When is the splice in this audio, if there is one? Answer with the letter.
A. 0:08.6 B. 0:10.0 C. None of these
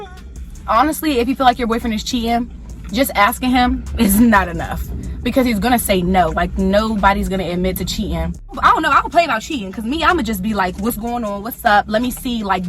A